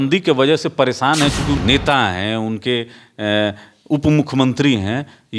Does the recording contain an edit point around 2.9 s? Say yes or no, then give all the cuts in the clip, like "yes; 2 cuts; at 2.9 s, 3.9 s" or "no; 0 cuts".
no; 1 cut; at 1.6 s